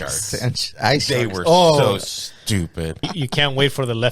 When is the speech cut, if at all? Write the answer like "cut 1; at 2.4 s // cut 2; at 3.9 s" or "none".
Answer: cut 1; at 3.0 s